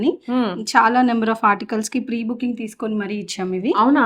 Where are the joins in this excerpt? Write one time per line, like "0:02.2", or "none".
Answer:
none